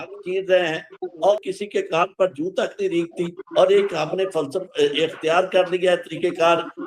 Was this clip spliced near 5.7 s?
no; 1 cut; at 1.3 s

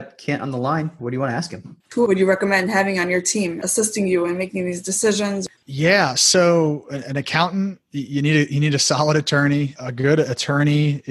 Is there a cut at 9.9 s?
no; 3 cuts; at 1.9 s, 3.6 s, 5.4 s

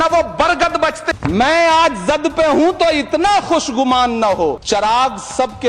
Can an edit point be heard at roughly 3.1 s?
no; 2 cuts; at 1.0 s, 4.6 s

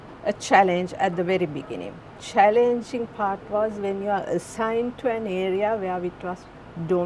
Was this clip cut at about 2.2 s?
yes; 1 cut; at 2.2 s

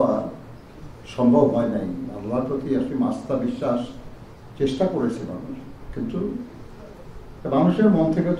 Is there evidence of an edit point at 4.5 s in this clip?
no; 0 cuts

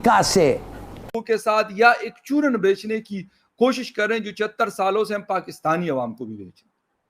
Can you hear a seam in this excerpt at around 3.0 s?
no; 1 cut; at 1.1 s

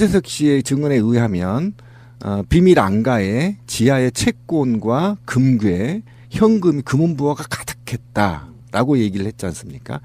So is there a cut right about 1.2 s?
yes; 1 cut; at 1.2 s

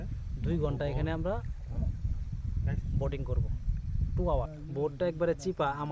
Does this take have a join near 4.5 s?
yes; 1 cut; at 4.5 s

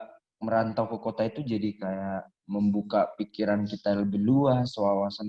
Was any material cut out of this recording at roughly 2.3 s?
no; 0 cuts

